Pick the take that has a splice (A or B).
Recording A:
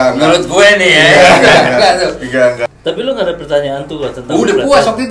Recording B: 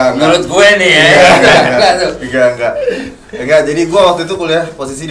A